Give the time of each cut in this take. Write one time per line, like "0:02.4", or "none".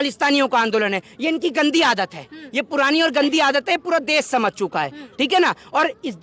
none